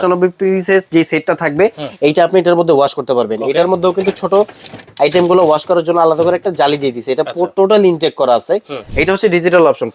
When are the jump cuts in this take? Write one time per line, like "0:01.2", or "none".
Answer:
0:08.8